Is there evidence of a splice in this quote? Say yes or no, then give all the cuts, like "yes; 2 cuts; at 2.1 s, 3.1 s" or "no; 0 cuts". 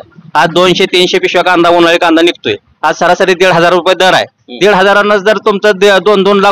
no; 0 cuts